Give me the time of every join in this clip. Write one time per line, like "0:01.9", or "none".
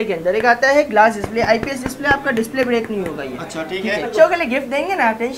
0:04.1